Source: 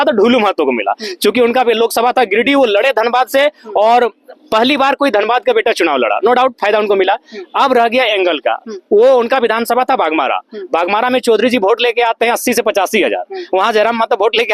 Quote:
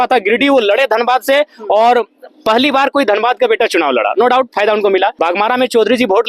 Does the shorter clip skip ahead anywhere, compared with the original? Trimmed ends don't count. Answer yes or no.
yes